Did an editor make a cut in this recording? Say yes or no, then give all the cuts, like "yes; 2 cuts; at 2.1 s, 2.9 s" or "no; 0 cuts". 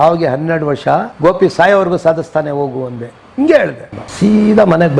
yes; 2 cuts; at 1.1 s, 3.9 s